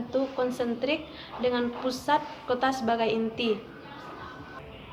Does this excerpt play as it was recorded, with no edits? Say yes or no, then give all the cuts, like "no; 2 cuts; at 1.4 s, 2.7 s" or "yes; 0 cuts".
yes; 0 cuts